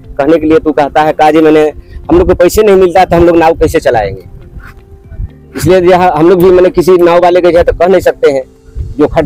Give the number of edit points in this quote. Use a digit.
0